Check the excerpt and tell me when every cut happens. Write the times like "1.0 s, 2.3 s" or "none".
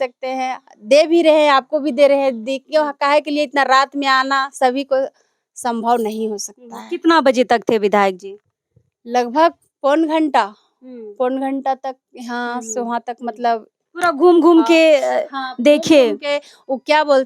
none